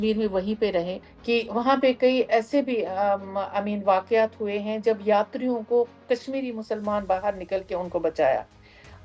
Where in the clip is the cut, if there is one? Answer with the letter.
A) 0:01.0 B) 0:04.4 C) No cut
A